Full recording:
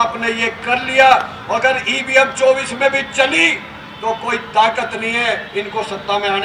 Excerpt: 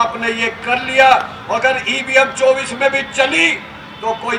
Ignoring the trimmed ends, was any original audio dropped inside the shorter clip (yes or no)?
no